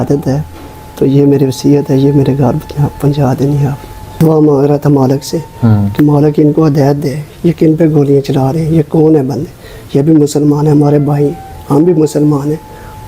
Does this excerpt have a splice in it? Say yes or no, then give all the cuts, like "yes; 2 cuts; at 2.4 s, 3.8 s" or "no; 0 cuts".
yes; 1 cut; at 4.2 s